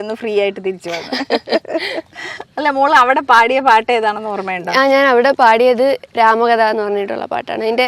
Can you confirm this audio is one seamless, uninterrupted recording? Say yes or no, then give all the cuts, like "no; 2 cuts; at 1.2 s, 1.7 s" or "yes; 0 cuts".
yes; 0 cuts